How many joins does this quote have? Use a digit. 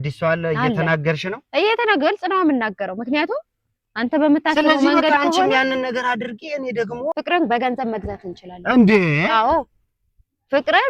1